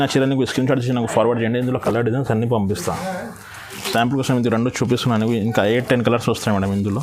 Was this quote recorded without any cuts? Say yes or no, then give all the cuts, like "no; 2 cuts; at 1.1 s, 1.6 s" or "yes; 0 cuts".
no; 1 cut; at 3.7 s